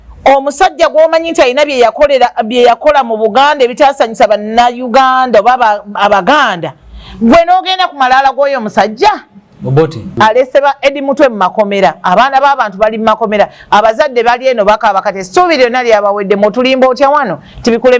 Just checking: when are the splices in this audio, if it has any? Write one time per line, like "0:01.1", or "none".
0:10.0

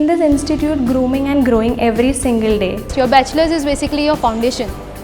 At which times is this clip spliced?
0:02.9

